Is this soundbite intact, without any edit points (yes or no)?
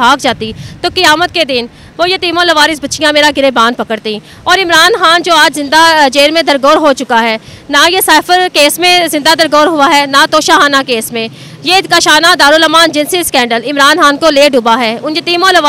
yes